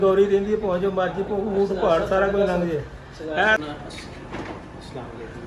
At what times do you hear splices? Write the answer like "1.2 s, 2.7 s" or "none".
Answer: 3.6 s

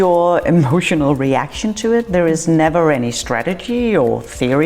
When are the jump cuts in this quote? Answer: none

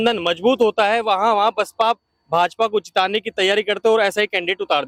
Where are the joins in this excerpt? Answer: none

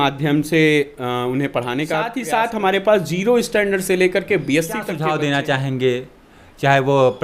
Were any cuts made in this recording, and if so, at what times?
2.2 s, 4.9 s

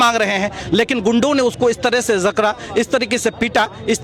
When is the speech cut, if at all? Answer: none

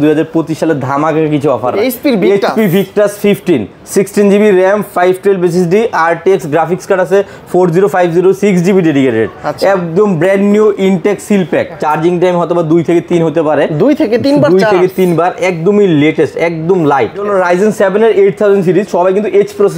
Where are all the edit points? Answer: 1.8 s, 11.7 s, 17.3 s

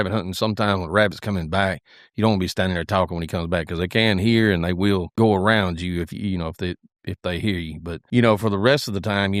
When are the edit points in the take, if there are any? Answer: 5.1 s, 8.0 s

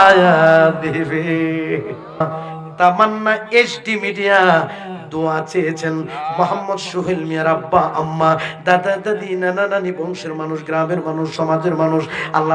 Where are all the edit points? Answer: 2.2 s

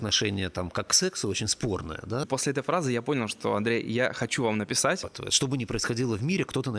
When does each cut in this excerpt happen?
2.3 s, 5.2 s

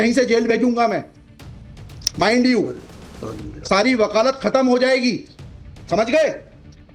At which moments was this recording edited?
none

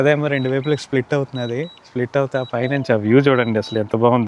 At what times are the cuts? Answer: none

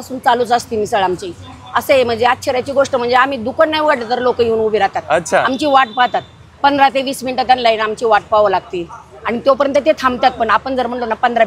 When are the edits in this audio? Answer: none

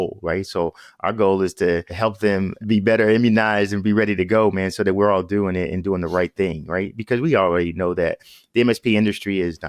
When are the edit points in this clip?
2.5 s

